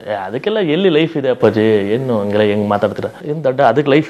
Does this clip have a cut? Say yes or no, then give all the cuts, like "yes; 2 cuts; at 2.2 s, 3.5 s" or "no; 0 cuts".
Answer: yes; 1 cut; at 3.1 s